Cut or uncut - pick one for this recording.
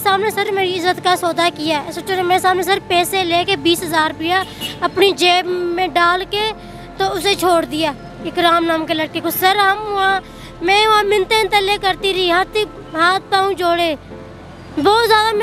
uncut